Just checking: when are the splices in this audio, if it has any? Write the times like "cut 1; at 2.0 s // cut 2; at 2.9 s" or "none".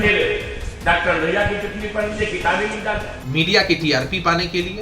cut 1; at 3.2 s